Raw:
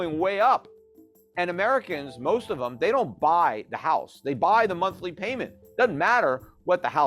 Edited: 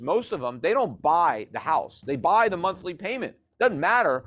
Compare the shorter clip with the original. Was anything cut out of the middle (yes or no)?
no